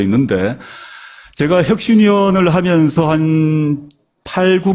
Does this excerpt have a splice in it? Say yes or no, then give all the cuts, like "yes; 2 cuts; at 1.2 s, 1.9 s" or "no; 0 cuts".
yes; 1 cut; at 3.7 s